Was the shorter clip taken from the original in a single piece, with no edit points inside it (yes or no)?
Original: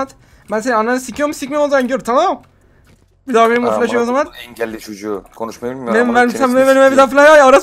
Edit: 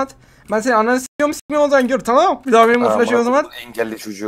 no